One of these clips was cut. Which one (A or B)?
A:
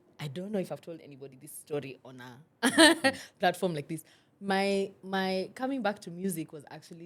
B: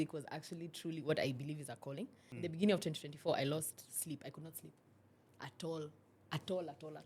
B